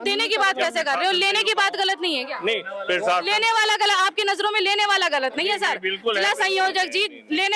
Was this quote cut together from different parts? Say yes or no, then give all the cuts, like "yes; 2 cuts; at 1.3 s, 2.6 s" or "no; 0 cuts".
no; 0 cuts